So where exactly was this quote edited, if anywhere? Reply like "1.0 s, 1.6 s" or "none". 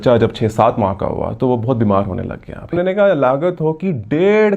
2.7 s

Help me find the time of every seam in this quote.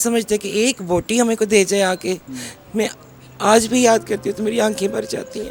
none

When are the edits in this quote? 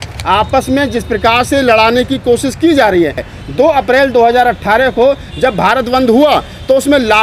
3.1 s

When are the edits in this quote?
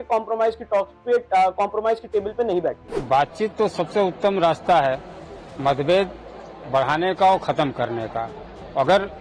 2.9 s

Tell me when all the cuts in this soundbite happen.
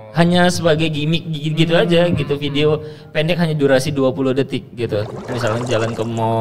5.3 s

